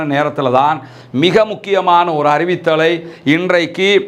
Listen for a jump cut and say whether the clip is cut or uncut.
uncut